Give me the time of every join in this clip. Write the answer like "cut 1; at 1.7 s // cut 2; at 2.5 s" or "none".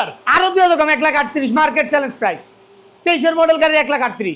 none